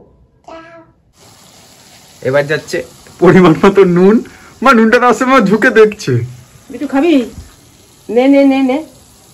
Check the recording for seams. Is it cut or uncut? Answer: cut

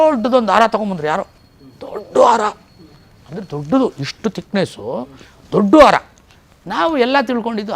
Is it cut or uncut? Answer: uncut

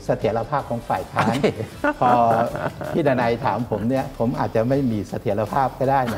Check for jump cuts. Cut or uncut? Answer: cut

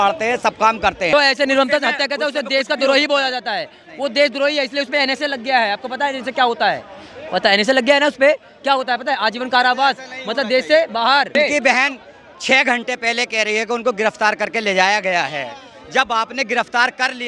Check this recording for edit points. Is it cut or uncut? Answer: cut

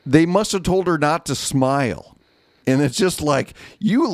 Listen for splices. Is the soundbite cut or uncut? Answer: cut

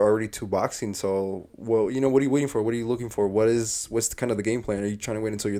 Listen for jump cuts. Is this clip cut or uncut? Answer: uncut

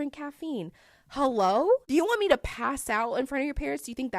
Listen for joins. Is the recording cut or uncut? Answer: cut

